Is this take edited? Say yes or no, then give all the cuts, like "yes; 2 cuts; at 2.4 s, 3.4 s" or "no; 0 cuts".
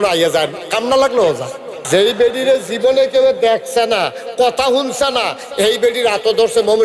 yes; 1 cut; at 1.7 s